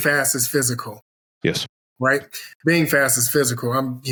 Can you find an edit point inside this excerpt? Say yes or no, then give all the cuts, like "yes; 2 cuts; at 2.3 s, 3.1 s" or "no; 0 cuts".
no; 0 cuts